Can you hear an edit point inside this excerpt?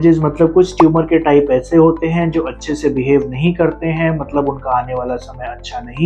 no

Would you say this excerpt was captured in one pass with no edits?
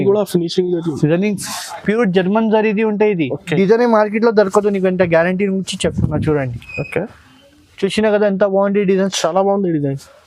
no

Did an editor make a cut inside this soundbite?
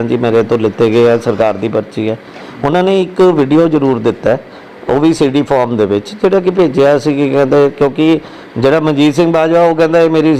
no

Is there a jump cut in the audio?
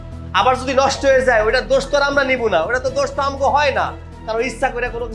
no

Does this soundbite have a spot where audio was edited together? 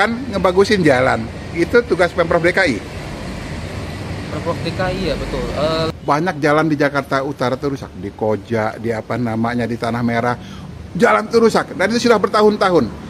yes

